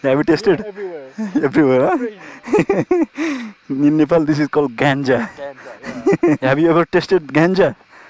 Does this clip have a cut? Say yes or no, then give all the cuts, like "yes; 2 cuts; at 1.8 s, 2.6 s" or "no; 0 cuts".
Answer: yes; 1 cut; at 6.4 s